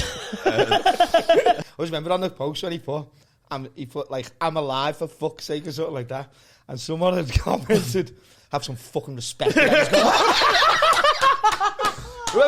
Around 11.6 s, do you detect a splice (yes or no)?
no